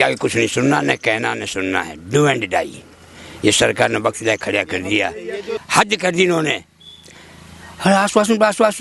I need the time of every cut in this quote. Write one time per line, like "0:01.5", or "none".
0:05.6